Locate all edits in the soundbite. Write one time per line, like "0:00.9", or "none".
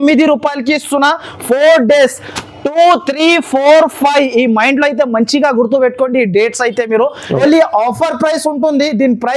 0:07.4

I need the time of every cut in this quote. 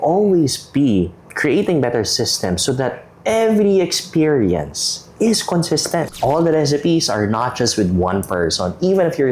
0:06.1

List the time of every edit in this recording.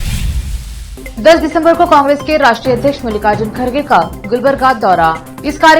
0:00.9

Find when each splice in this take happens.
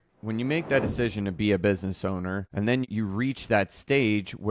0:02.9

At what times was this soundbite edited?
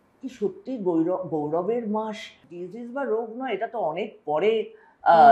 0:02.5

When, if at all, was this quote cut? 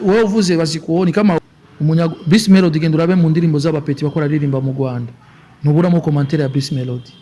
0:01.4

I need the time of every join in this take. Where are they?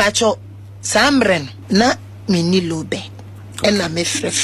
0:01.5

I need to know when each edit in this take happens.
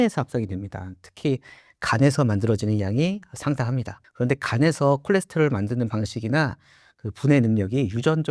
none

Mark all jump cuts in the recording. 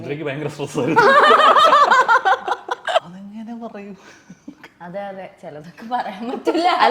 0:03.0

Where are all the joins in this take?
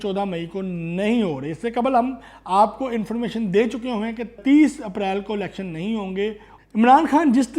0:04.4
0:06.5

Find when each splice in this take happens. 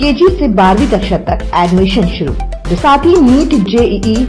0:02.7

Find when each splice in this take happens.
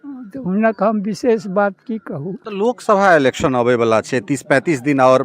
0:02.5

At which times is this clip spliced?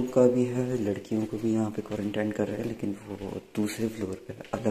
none

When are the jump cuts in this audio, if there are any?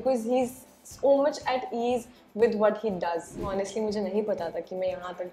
0:03.4

